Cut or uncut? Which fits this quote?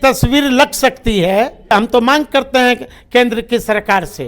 cut